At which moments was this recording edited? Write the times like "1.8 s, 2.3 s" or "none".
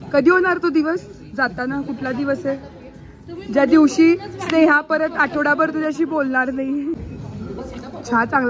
none